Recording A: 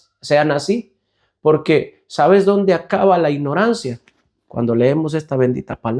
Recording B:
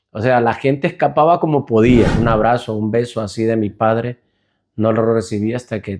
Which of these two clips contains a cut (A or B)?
B